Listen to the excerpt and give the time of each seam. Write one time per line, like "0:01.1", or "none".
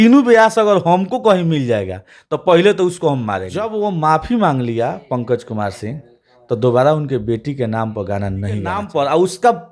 0:03.7
0:08.8